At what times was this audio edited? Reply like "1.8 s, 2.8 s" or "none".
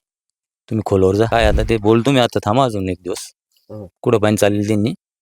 1.3 s